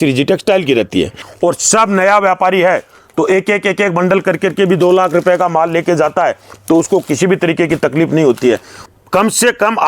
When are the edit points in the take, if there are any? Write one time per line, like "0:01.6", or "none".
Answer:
0:01.2
0:08.8

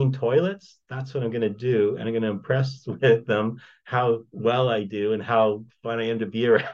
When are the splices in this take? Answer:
0:04.1
0:05.7

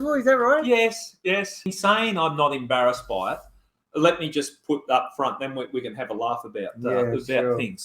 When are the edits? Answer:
0:01.7

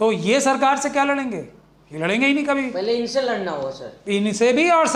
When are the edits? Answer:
none

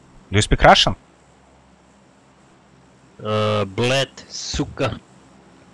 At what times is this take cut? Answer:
none

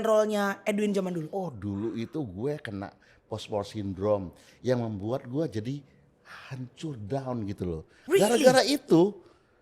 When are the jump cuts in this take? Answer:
0:01.3

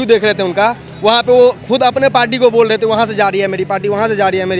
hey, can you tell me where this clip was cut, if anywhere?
none

